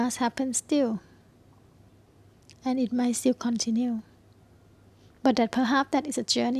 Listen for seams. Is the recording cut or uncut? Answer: uncut